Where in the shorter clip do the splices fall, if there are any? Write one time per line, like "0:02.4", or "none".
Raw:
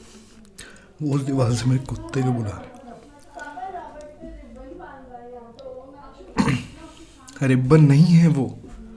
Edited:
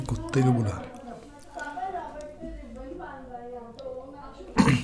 none